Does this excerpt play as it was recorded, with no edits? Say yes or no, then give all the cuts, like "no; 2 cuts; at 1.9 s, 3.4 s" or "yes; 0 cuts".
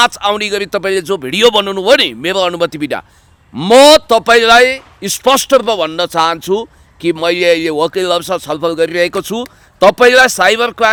yes; 0 cuts